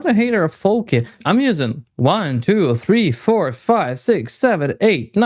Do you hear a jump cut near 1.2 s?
yes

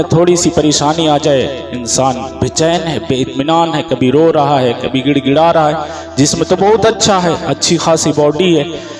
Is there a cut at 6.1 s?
no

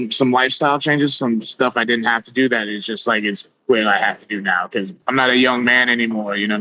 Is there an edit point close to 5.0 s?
yes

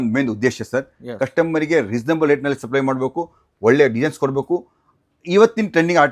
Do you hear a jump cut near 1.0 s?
no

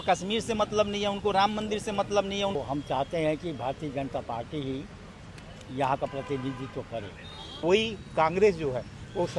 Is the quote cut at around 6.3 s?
no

